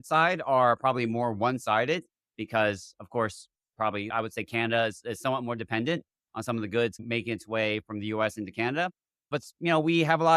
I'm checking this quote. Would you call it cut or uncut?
cut